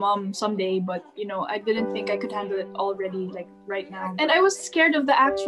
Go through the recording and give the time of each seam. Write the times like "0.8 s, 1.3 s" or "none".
4.1 s